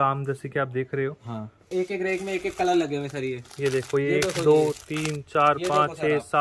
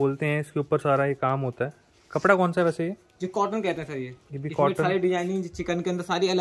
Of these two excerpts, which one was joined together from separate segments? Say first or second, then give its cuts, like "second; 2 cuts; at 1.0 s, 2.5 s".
first; 1 cut; at 1.6 s